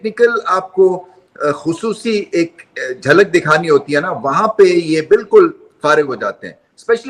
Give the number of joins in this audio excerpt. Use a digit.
0